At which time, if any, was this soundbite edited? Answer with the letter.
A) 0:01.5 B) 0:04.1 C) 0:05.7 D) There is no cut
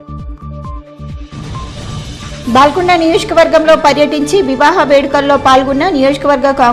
A